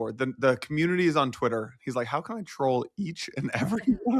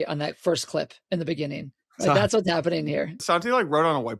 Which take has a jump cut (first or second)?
second